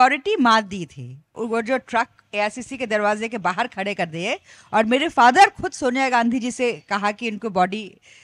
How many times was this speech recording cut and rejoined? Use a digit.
1